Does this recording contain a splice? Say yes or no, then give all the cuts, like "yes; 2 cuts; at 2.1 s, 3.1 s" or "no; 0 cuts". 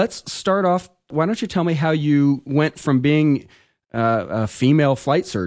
yes; 1 cut; at 3.0 s